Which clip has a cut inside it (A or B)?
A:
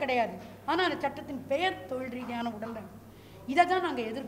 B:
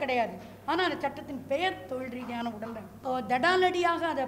B